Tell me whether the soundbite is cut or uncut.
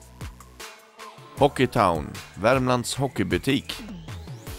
cut